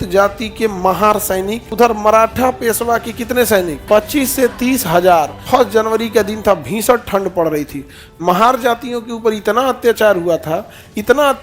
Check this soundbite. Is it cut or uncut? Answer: cut